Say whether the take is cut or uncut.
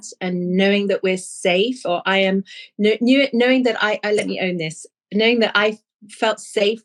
uncut